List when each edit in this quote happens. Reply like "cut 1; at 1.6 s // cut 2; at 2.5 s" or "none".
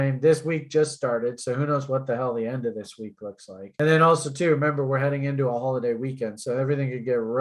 none